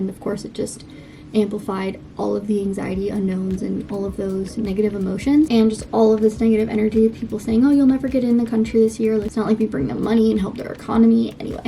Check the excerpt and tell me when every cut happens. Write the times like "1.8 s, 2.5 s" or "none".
5.5 s, 9.3 s